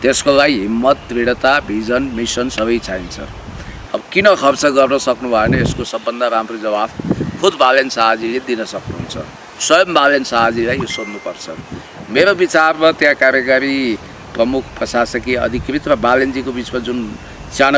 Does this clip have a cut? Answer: no; 0 cuts

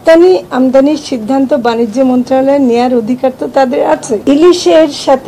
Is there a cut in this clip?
yes; 1 cut; at 4.2 s

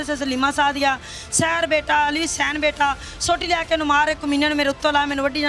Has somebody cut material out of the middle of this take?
no; 0 cuts

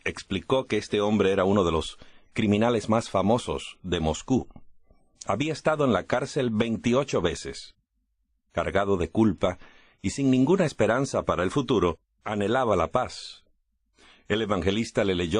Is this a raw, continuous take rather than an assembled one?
no; 1 cut; at 2.1 s

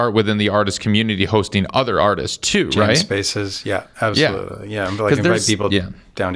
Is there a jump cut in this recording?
no; 0 cuts

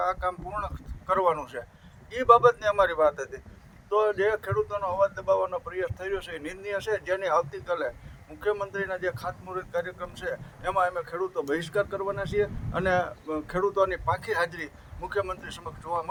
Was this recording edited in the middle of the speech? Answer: no; 0 cuts

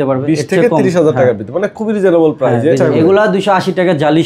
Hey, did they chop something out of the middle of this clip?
yes; 1 cut; at 2.8 s

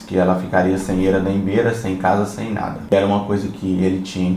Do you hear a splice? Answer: yes; 1 cut; at 2.9 s

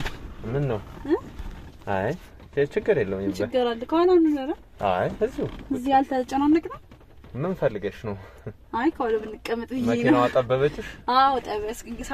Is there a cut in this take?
no; 0 cuts

